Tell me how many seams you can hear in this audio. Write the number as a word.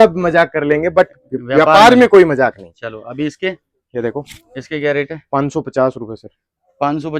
zero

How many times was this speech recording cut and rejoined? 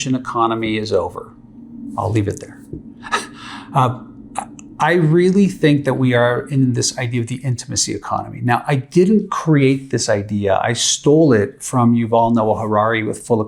zero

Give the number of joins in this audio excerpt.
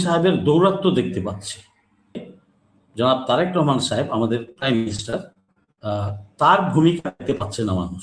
one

